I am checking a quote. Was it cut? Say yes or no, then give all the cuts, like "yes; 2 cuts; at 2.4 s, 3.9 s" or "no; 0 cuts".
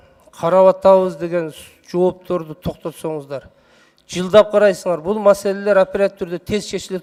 no; 0 cuts